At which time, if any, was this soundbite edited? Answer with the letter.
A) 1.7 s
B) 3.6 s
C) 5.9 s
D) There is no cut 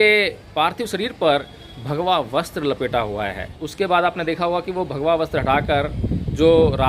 B